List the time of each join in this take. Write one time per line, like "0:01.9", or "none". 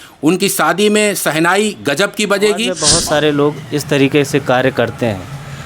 0:02.9